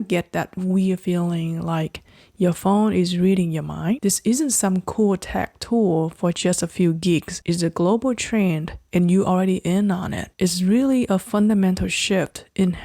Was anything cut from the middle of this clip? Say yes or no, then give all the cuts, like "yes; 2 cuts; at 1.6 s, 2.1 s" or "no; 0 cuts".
yes; 3 cuts; at 4.0 s, 7.3 s, 10.2 s